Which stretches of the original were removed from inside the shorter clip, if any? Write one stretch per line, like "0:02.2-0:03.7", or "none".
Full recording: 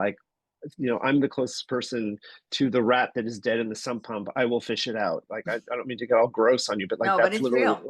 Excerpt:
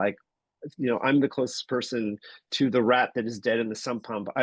none